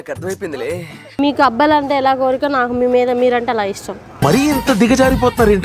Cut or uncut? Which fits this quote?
cut